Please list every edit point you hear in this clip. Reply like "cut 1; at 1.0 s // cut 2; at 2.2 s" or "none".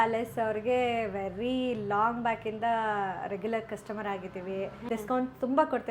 cut 1; at 4.8 s